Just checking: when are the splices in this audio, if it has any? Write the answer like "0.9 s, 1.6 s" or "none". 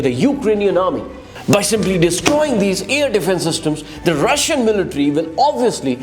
1.3 s